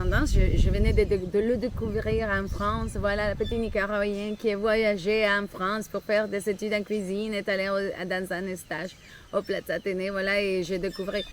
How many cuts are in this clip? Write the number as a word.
zero